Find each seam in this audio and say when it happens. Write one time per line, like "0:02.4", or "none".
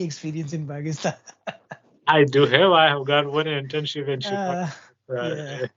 none